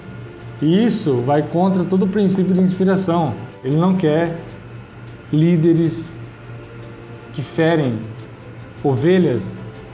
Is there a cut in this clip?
yes; 1 cut; at 3.5 s

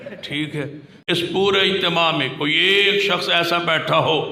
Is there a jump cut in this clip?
yes; 1 cut; at 1.0 s

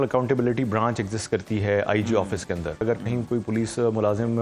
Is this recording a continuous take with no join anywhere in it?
no; 1 cut; at 2.8 s

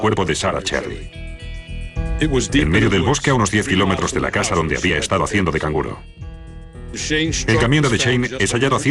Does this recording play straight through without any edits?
yes; 0 cuts

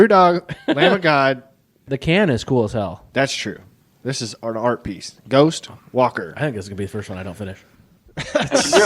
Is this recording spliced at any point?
yes; 1 cut; at 1.8 s

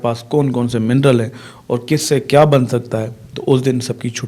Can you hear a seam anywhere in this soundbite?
no; 0 cuts

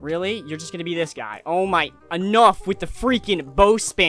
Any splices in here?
no; 0 cuts

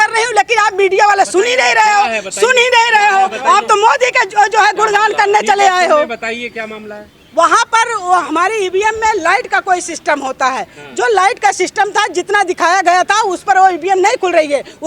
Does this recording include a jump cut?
no; 0 cuts

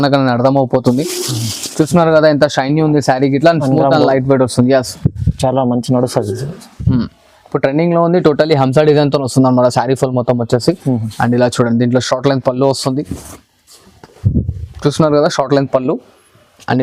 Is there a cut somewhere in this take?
no; 0 cuts

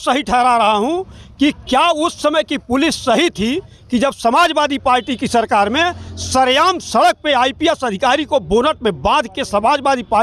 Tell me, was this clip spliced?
no; 0 cuts

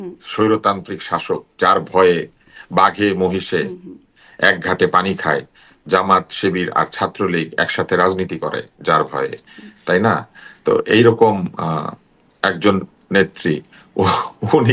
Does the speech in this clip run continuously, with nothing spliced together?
yes; 0 cuts

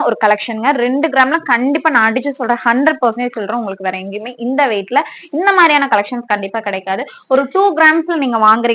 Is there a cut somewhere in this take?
no; 0 cuts

